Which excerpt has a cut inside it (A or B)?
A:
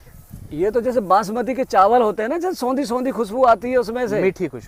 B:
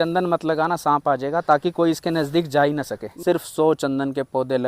B